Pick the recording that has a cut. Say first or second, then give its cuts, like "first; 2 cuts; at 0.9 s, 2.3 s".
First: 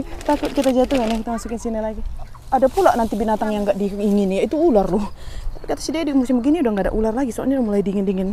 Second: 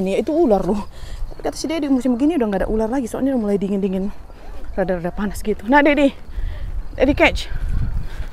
first; 1 cut; at 2.4 s